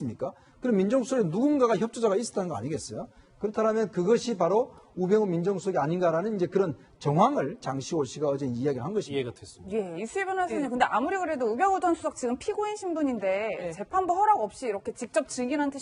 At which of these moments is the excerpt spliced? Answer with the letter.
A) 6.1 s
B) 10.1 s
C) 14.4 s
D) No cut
A